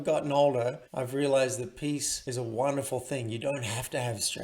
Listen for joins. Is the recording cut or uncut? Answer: cut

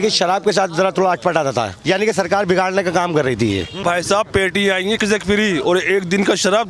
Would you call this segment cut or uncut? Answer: cut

